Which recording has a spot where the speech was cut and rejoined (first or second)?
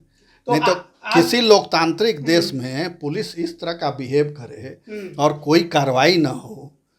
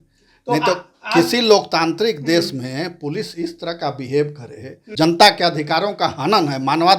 second